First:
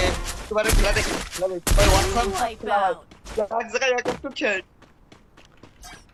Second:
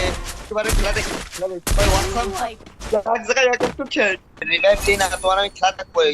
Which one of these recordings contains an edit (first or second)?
second